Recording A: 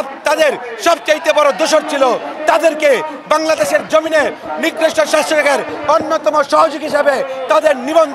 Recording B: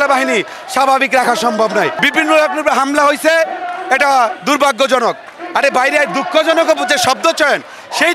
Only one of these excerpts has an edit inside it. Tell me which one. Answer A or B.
B